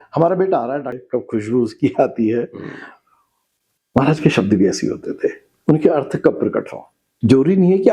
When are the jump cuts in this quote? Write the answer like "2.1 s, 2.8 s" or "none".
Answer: 1.0 s